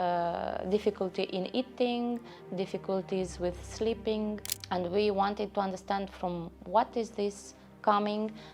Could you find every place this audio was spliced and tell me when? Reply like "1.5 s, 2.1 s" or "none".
4.5 s